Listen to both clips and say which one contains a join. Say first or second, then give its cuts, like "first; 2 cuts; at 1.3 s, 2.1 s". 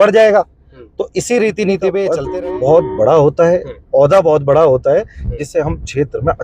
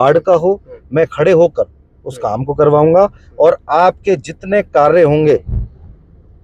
first; 1 cut; at 2.2 s